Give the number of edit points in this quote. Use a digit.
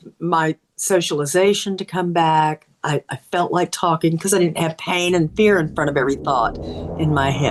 0